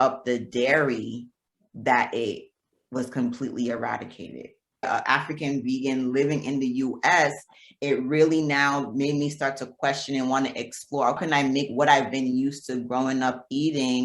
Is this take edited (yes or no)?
yes